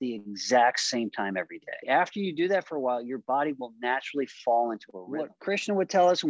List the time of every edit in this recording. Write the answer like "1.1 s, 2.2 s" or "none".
1.9 s, 5.0 s